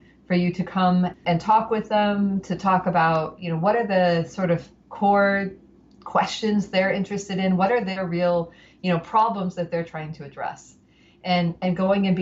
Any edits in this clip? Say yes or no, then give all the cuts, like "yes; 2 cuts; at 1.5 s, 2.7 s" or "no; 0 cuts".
yes; 1 cut; at 1.1 s